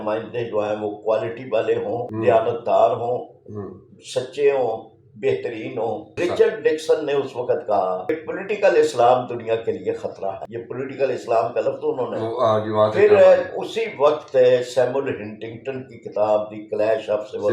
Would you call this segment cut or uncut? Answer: cut